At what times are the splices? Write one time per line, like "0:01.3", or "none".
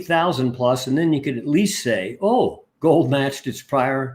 0:02.7